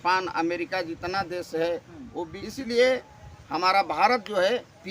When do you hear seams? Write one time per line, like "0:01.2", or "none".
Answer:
0:02.4